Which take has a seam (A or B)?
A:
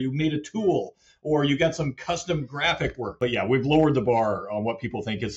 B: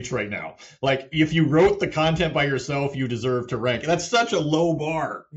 A